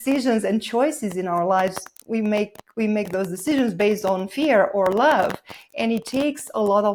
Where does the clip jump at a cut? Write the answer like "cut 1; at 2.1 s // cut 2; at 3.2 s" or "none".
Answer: none

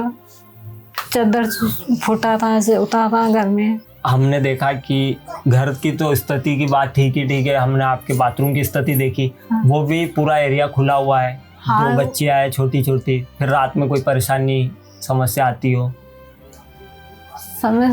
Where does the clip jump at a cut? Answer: cut 1; at 3.9 s

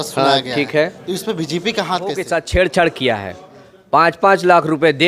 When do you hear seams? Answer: cut 1; at 2.3 s

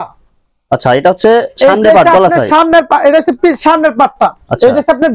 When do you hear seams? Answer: none

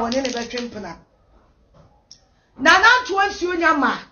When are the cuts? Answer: cut 1; at 2.7 s

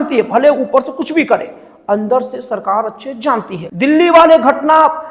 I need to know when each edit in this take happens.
cut 1; at 3.6 s

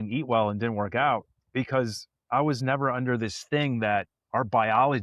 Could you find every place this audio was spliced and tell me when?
cut 1; at 1.4 s // cut 2; at 4.2 s

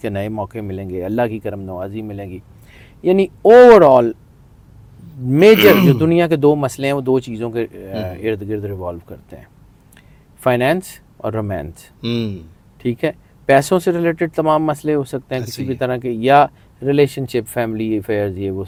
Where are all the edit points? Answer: none

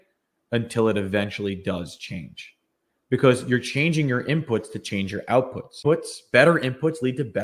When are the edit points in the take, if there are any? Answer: cut 1; at 5.8 s

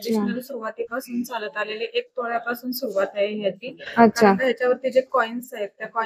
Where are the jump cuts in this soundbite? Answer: none

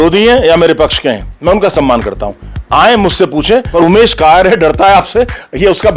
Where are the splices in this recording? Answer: cut 1; at 3.7 s

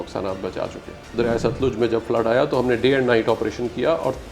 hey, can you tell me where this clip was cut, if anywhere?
cut 1; at 0.9 s

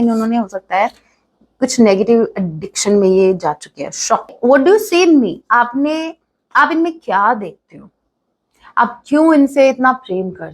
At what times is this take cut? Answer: cut 1; at 4.3 s

